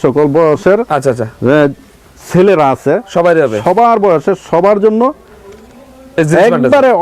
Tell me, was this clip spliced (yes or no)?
no